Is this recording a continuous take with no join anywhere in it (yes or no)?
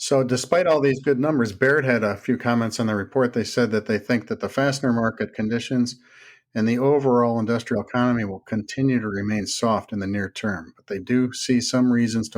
yes